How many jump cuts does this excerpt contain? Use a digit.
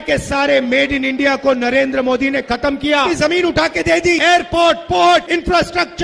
1